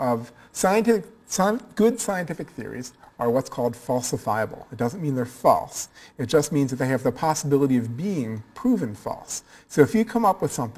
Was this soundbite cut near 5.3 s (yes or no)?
yes